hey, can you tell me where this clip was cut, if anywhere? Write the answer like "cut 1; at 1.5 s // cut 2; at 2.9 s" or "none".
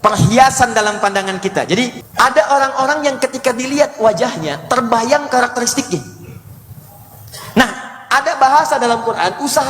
cut 1; at 2.0 s